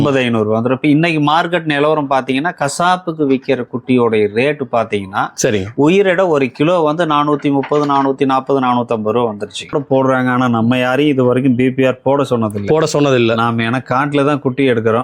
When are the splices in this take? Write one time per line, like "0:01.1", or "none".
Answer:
0:09.7